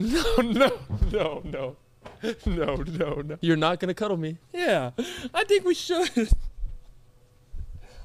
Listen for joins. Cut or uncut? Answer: cut